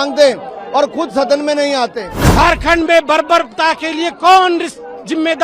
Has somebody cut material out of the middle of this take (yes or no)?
yes